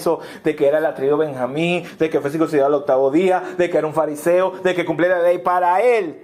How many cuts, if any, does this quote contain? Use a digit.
0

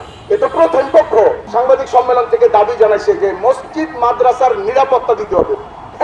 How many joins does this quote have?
1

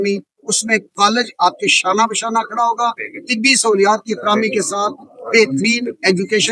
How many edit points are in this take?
0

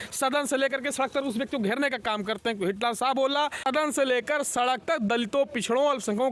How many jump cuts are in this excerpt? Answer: 1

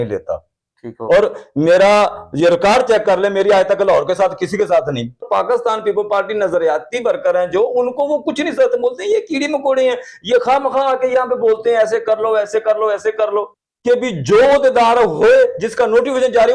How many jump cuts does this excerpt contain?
2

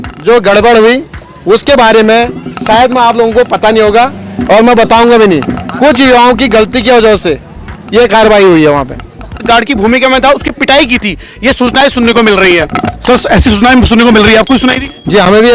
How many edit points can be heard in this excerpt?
1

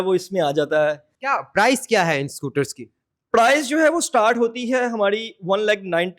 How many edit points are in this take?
1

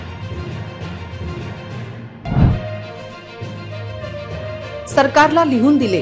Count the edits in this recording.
0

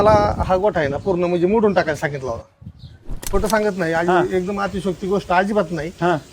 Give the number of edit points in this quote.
1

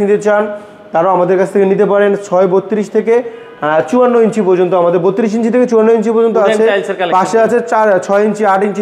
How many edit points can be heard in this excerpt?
0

